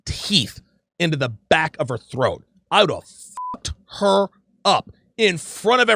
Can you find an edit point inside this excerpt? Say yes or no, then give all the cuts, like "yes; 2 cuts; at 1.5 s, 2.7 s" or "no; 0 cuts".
no; 0 cuts